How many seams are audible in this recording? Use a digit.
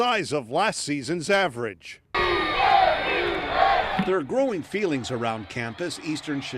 0